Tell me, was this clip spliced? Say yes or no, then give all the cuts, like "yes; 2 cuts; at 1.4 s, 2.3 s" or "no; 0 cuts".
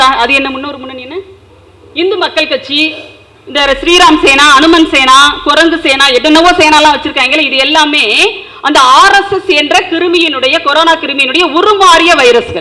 no; 0 cuts